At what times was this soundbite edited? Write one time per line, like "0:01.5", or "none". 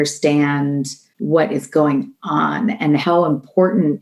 0:03.0